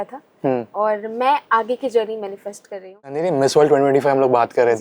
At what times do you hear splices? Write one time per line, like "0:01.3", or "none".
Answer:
0:03.2